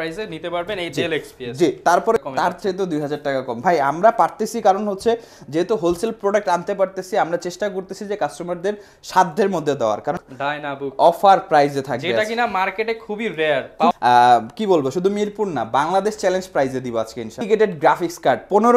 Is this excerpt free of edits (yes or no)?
no